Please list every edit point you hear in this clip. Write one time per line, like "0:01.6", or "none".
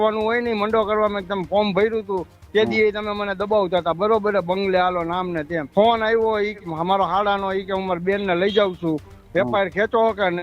0:05.6
0:06.6